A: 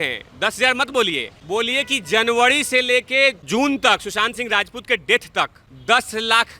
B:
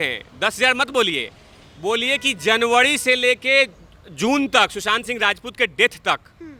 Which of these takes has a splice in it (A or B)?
A